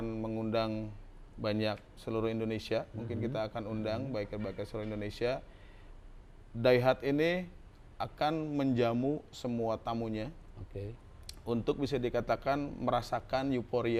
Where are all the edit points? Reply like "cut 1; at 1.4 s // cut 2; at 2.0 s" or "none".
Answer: none